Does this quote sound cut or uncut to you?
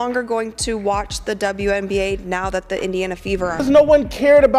cut